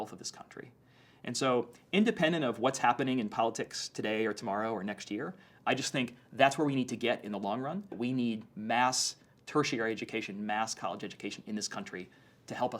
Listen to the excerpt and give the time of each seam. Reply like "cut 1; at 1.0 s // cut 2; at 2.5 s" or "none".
cut 1; at 7.9 s